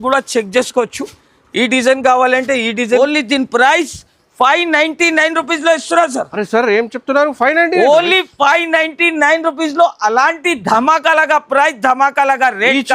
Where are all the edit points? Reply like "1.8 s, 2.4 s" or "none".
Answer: 3.0 s